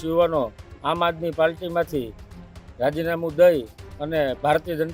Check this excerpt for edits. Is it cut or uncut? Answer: uncut